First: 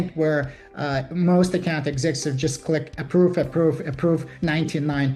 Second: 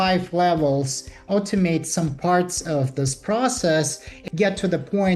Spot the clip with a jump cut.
second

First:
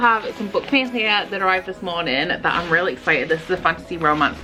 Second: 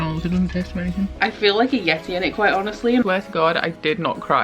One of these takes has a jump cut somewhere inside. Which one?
second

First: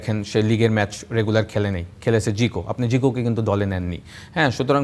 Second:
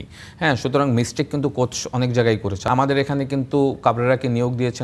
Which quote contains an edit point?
second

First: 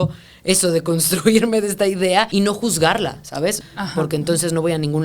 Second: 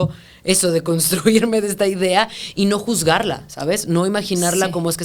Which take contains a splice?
first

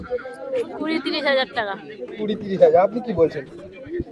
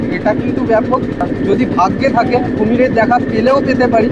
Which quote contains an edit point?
second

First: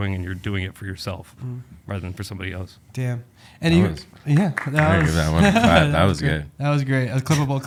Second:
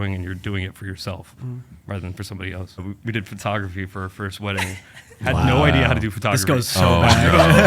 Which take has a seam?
second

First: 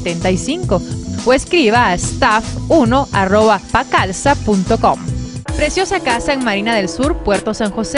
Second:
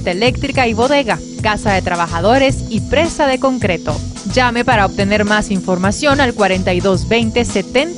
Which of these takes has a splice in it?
first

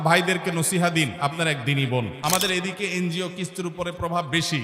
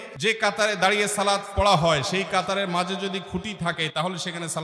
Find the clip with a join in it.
first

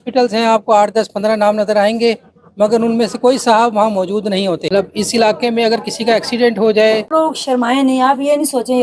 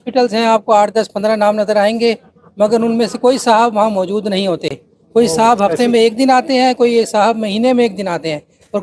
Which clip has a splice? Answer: first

